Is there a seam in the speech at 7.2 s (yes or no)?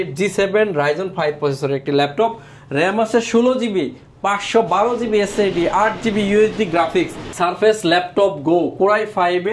yes